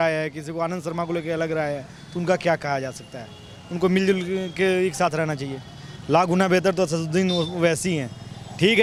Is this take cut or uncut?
uncut